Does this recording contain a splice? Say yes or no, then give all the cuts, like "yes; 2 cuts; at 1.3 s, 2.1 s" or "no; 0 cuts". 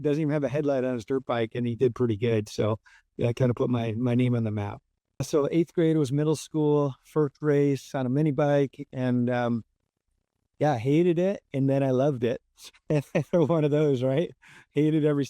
yes; 1 cut; at 5.2 s